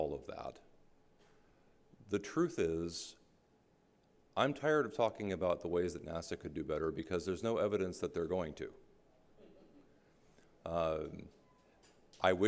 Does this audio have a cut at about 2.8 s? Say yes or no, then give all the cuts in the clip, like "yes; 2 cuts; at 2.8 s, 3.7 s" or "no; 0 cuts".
no; 0 cuts